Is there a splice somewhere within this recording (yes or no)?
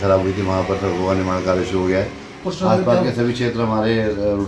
yes